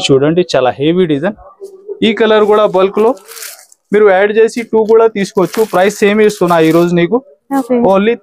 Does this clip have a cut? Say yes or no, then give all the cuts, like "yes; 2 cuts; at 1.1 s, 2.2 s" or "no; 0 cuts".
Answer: no; 0 cuts